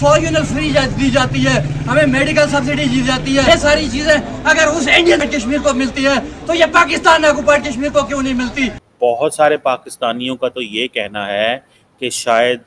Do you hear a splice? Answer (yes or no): yes